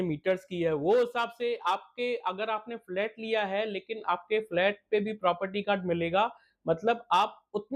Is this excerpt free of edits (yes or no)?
yes